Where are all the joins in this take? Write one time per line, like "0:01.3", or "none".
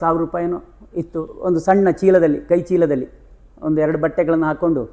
0:01.3